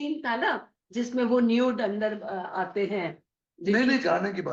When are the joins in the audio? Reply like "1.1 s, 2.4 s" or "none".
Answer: none